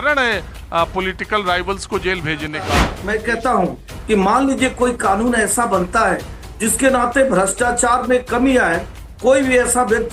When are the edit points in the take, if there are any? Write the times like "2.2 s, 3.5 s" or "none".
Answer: 2.9 s